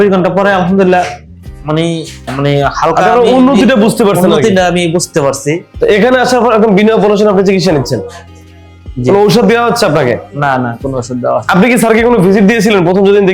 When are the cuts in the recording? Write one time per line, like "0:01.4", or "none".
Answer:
0:02.3
0:05.7